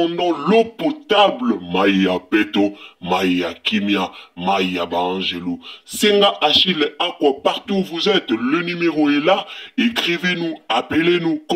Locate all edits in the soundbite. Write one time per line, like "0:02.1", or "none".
none